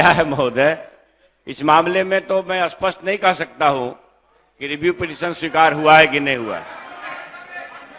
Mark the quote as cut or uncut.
uncut